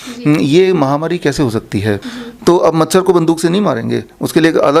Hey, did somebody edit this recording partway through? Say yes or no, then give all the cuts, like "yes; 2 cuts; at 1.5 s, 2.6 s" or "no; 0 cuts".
yes; 1 cut; at 2.1 s